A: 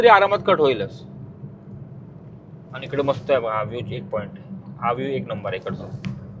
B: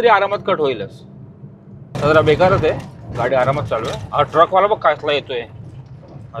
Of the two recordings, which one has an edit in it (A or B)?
B